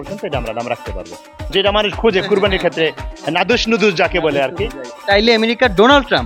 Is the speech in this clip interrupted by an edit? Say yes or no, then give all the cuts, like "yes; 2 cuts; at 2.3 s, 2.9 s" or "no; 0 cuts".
yes; 2 cuts; at 1.5 s, 4.9 s